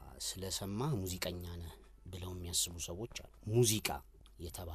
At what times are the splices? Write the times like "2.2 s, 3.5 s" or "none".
3.3 s